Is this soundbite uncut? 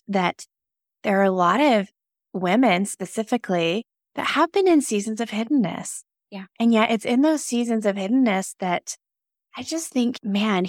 yes; 0 cuts

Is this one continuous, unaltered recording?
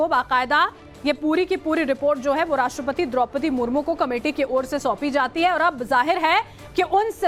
yes; 0 cuts

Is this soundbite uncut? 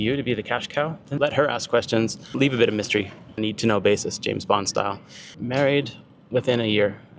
no; 3 cuts; at 1.1 s, 2.3 s, 5.3 s

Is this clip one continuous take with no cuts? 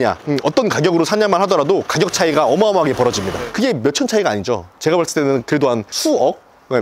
yes; 0 cuts

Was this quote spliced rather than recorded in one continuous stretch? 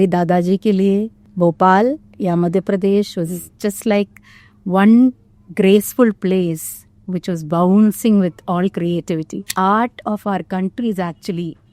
yes; 2 cuts; at 1.2 s, 9.4 s

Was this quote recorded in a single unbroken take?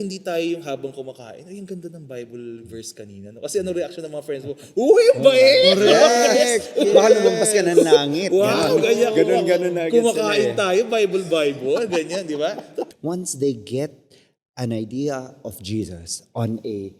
no; 1 cut; at 12.9 s

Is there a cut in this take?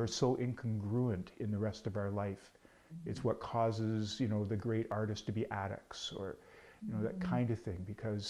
no; 0 cuts

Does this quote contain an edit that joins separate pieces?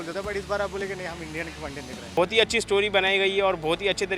yes; 1 cut; at 2.2 s

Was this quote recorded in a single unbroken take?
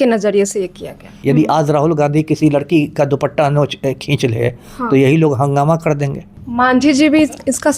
no; 2 cuts; at 1.1 s, 6.4 s

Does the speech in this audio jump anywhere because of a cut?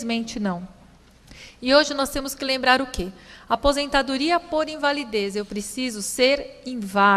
yes; 1 cut; at 4.1 s

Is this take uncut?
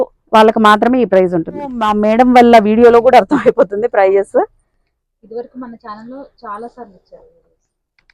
no; 1 cut; at 1.9 s

